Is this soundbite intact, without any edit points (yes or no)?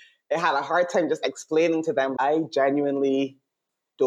no